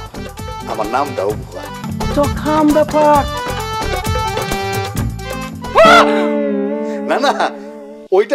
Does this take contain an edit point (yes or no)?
yes